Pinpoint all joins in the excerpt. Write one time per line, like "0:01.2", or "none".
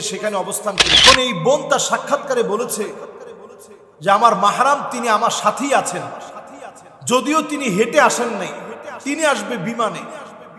0:01.0